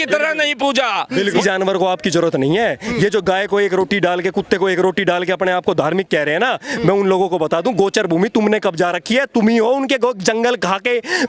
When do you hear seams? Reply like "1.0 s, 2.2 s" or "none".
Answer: 1.2 s

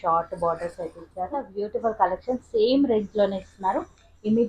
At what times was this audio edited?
1.5 s

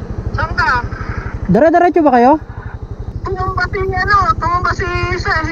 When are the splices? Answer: 3.1 s

